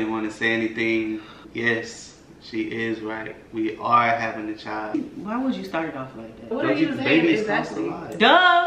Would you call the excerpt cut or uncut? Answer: cut